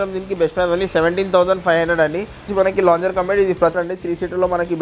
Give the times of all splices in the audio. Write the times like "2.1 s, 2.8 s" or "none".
2.5 s, 3.7 s